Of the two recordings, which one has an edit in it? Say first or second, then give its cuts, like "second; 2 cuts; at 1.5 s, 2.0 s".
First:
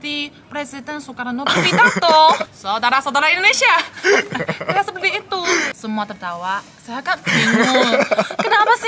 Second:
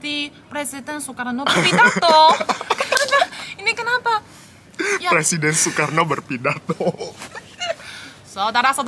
first; 3 cuts; at 2.4 s, 3.9 s, 5.7 s